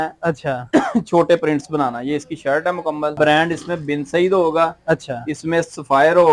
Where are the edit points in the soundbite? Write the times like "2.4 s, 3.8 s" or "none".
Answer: 3.1 s